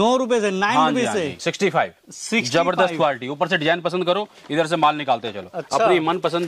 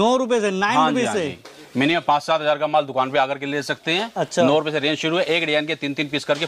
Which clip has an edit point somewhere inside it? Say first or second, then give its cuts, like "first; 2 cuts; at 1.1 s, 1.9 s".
first; 1 cut; at 1.4 s